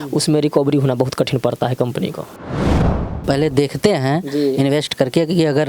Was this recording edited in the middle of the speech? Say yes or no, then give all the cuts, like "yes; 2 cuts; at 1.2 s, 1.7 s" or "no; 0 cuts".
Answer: yes; 1 cut; at 2.9 s